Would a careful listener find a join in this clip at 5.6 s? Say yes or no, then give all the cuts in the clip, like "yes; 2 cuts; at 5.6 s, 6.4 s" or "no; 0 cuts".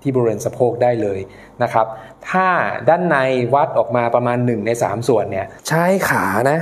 yes; 1 cut; at 5.6 s